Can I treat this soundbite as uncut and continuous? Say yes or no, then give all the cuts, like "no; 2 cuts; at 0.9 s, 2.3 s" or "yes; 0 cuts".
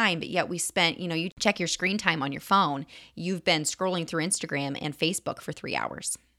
no; 1 cut; at 1.3 s